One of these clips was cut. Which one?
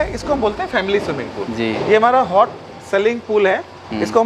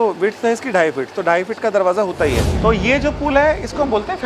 second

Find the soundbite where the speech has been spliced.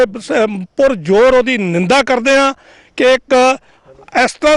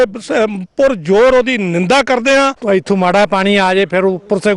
second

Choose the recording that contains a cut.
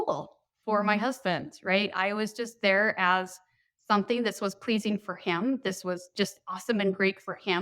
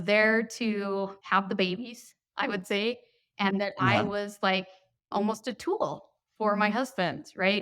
second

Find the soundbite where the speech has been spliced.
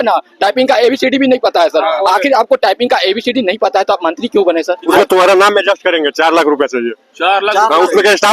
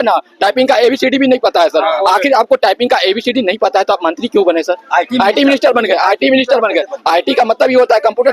first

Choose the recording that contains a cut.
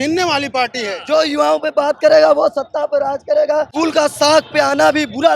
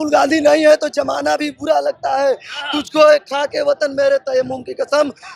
first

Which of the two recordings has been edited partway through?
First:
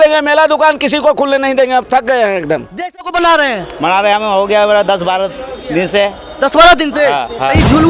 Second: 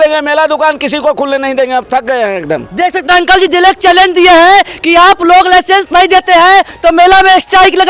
first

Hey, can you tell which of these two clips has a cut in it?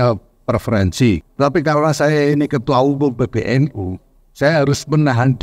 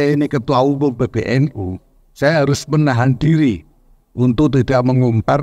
first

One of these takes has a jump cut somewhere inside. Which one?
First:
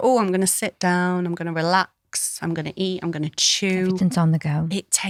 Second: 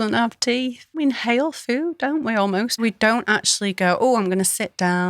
second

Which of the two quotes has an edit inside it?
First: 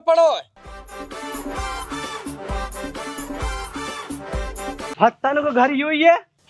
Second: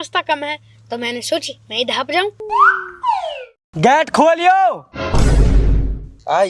second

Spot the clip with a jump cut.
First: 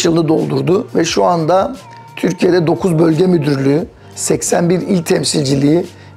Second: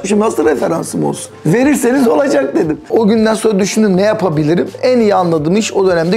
second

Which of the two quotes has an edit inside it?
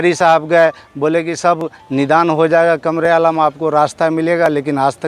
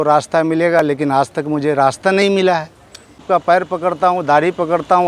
second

